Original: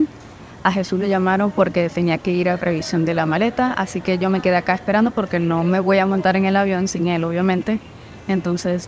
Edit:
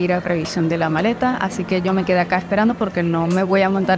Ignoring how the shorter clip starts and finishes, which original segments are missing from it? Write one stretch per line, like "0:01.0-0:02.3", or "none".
none